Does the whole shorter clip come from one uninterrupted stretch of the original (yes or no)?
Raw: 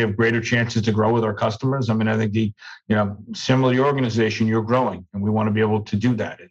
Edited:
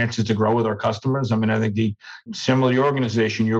no